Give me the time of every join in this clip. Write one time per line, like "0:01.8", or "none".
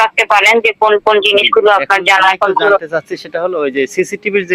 none